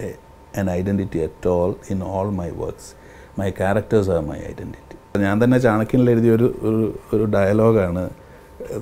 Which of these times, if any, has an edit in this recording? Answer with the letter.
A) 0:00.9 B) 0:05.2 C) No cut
B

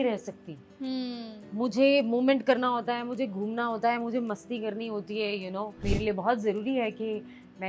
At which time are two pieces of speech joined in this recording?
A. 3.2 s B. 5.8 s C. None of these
B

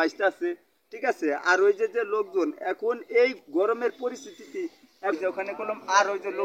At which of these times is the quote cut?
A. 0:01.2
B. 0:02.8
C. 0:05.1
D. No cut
C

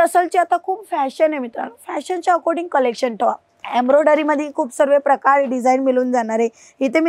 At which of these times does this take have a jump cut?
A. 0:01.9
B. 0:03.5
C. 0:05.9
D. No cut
B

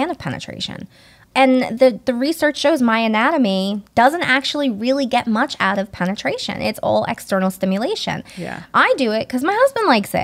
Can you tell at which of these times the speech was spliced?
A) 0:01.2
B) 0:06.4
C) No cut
A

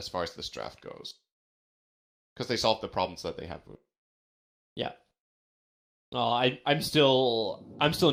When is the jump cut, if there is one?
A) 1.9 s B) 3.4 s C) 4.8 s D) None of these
D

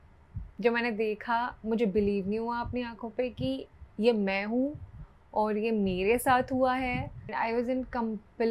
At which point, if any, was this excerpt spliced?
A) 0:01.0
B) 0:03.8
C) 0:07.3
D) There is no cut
C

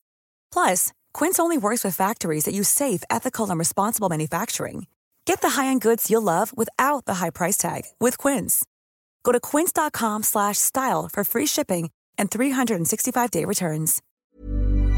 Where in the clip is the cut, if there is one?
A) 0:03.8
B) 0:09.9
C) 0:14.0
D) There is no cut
C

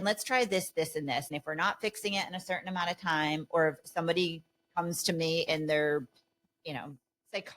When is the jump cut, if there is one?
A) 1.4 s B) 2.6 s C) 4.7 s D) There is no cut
A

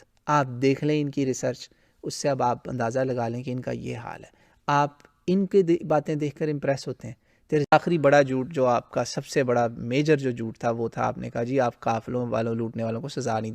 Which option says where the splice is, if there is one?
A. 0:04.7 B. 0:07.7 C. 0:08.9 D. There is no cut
B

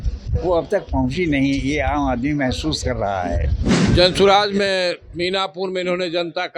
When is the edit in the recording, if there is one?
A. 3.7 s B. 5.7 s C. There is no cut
A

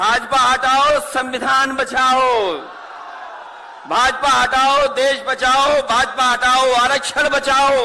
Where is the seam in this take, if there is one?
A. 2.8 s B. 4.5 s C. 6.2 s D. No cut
D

